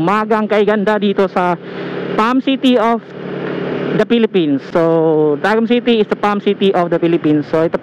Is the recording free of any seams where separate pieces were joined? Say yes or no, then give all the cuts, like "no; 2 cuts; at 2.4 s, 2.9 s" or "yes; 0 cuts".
yes; 0 cuts